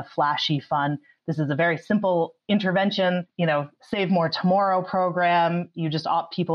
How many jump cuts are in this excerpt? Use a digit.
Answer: 0